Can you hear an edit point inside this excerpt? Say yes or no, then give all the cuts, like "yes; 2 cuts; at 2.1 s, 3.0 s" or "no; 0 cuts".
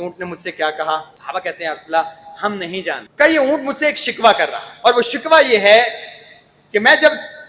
yes; 3 cuts; at 1.1 s, 3.1 s, 4.6 s